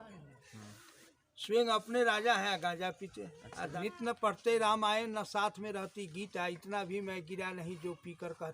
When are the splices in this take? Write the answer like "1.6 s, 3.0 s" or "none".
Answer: 3.7 s